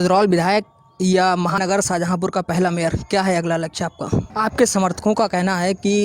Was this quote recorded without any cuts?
no; 2 cuts; at 1.6 s, 4.3 s

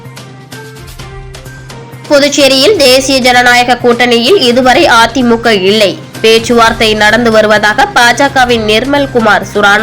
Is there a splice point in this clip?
yes; 1 cut; at 1.4 s

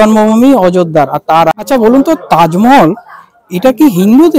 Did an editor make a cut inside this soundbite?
yes; 1 cut; at 1.5 s

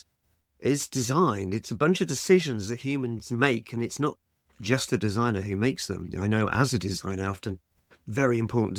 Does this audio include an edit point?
no; 0 cuts

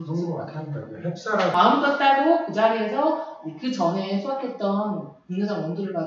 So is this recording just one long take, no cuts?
no; 1 cut; at 1.5 s

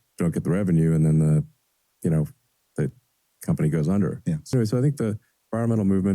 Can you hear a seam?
yes; 1 cut; at 4.5 s

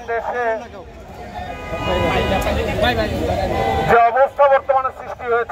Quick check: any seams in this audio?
no; 0 cuts

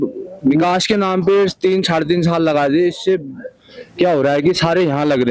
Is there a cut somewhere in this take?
no; 0 cuts

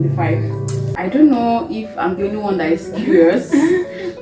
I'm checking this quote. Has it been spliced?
yes; 1 cut; at 0.9 s

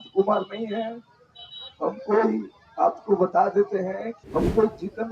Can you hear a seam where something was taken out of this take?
yes; 1 cut; at 4.1 s

